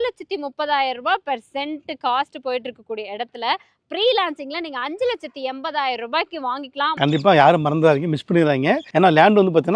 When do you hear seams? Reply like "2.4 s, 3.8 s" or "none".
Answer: 6.9 s, 8.9 s